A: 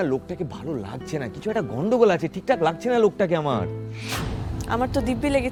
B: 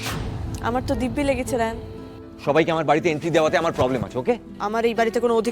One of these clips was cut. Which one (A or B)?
B